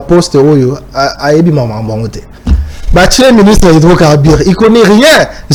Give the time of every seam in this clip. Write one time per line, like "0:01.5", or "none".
none